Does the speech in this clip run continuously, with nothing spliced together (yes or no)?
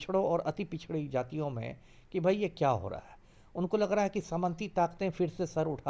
yes